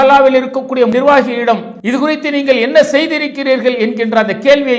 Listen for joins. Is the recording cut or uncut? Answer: cut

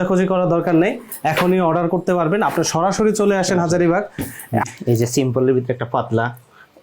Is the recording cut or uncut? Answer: cut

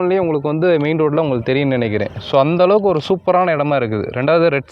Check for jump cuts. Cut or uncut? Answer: uncut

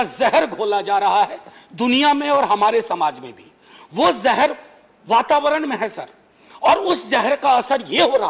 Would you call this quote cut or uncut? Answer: uncut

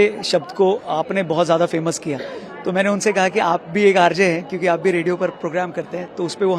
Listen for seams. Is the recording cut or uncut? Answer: uncut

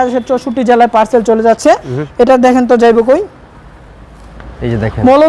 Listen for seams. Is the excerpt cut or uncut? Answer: uncut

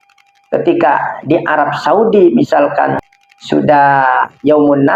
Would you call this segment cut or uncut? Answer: cut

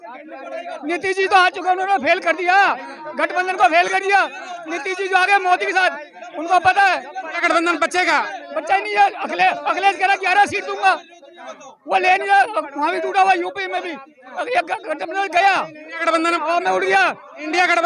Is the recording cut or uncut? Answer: uncut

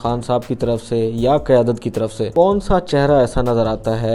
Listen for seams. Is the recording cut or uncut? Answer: cut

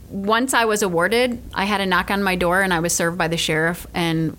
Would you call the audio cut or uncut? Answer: cut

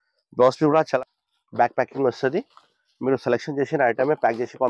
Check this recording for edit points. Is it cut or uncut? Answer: cut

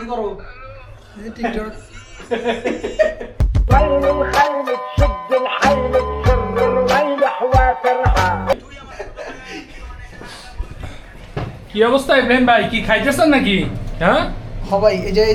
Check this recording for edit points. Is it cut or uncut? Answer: uncut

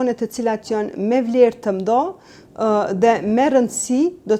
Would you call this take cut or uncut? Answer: uncut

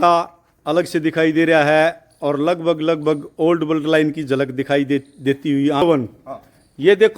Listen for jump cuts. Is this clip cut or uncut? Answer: cut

